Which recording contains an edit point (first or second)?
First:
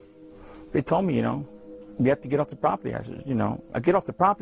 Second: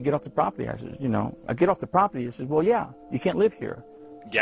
first